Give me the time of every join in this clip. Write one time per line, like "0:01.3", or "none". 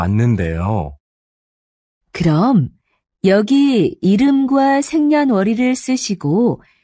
none